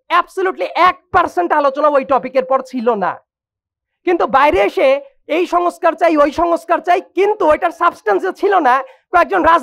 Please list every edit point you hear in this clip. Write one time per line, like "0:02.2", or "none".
none